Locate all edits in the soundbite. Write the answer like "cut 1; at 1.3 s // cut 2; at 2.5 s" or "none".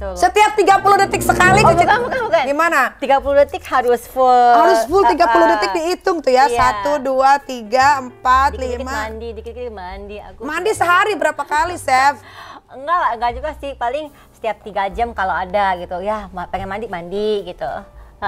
none